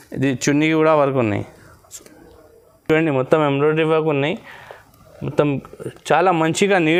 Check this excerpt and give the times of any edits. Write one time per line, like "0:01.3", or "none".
none